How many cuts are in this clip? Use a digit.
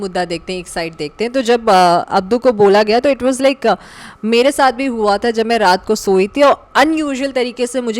0